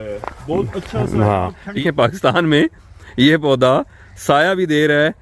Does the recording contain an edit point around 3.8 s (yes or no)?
no